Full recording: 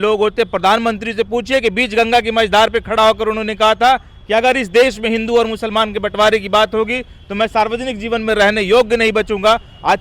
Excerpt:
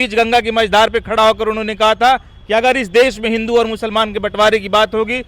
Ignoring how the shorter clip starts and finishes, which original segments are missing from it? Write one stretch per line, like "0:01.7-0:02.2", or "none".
none